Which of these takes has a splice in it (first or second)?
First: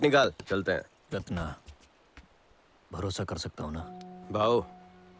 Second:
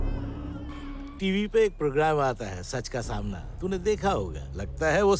second